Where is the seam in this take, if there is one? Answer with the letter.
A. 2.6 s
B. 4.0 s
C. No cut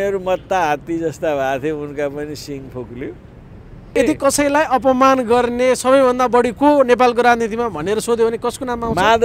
B